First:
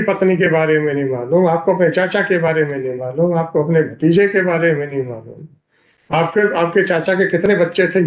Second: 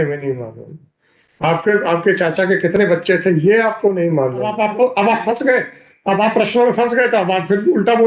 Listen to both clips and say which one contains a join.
second; 1 cut; at 4.5 s

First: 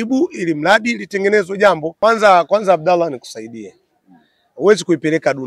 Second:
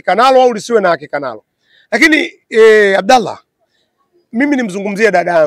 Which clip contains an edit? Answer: first; 1 cut; at 1.9 s

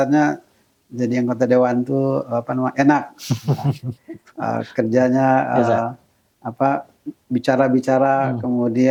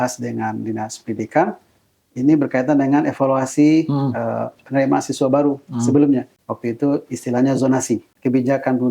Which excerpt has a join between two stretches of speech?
second; 2 cuts; at 6.4 s, 8.1 s

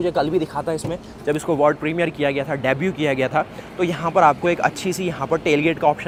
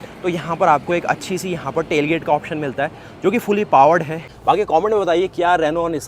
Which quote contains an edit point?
second; 1 cut; at 4.3 s

